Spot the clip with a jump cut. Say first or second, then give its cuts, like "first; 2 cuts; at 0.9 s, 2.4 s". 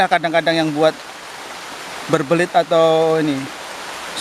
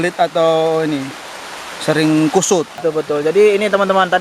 second; 1 cut; at 2.8 s